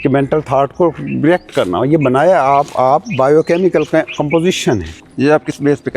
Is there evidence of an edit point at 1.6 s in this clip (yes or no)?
no